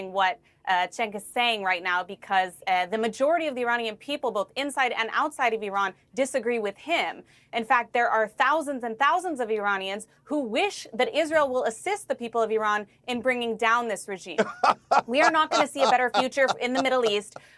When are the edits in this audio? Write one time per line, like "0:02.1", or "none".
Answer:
0:00.9